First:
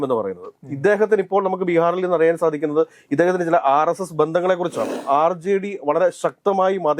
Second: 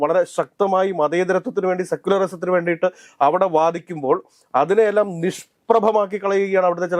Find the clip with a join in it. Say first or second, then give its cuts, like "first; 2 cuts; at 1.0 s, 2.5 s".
first; 1 cut; at 4.9 s